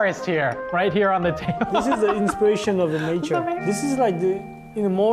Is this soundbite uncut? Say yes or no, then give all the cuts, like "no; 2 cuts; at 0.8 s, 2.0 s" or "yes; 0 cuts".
no; 1 cut; at 3.6 s